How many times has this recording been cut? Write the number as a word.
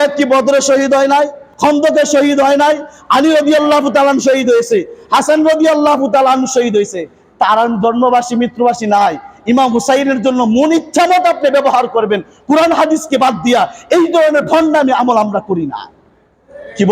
one